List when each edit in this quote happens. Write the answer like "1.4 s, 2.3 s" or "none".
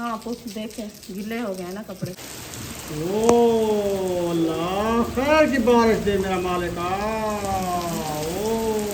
2.1 s